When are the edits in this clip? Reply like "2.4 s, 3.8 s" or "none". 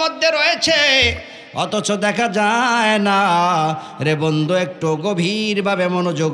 none